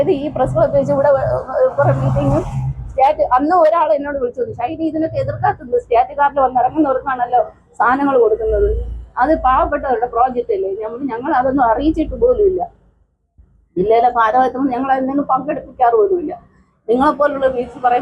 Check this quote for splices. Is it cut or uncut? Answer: uncut